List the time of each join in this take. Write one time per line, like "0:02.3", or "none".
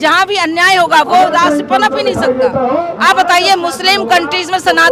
0:02.9